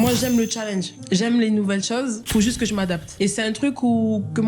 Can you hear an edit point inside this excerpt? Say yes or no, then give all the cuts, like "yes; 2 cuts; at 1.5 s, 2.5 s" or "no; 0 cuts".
yes; 3 cuts; at 0.9 s, 2.2 s, 3.1 s